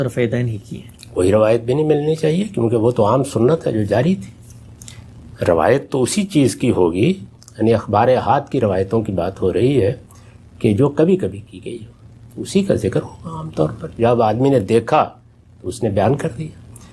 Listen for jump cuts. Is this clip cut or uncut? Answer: uncut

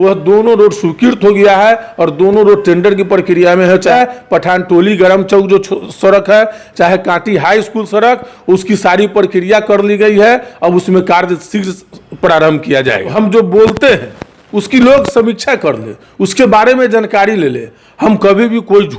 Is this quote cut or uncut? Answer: cut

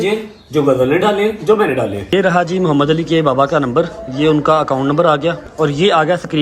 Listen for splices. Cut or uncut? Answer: cut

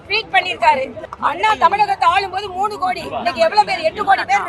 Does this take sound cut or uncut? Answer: cut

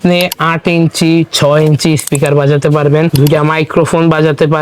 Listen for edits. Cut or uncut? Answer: cut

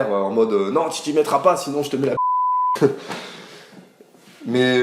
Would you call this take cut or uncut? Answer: uncut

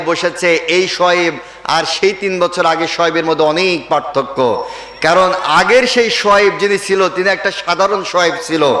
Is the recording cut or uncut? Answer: uncut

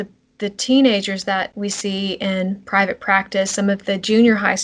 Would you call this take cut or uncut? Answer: uncut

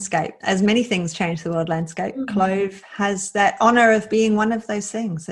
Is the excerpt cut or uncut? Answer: uncut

